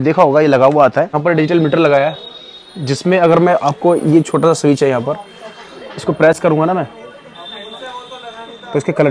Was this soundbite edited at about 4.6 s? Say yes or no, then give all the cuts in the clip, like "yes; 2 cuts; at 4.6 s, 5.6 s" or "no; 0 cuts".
no; 1 cut; at 1.2 s